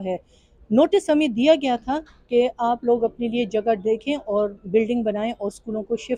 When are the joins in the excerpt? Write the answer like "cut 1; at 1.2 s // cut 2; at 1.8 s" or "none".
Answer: none